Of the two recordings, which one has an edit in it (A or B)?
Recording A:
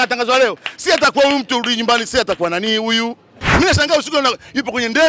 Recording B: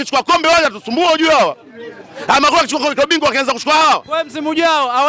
A